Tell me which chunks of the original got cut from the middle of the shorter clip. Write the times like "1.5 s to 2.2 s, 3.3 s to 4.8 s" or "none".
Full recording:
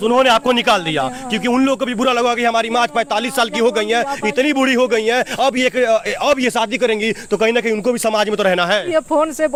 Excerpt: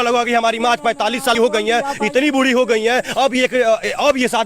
3.5 s to 3.6 s